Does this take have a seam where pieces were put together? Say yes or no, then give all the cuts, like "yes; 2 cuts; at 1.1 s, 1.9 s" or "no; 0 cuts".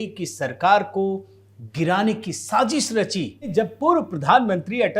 yes; 1 cut; at 3.5 s